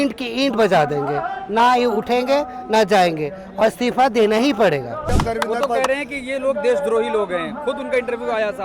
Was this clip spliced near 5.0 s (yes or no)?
yes